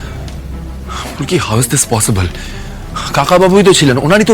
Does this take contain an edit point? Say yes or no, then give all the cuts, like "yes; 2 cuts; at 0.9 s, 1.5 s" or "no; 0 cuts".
no; 0 cuts